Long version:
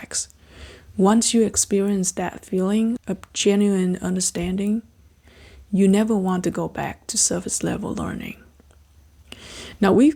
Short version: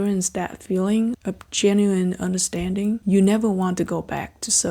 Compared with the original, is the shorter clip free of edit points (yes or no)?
no